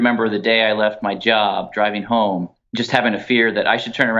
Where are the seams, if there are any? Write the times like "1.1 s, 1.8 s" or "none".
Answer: 2.6 s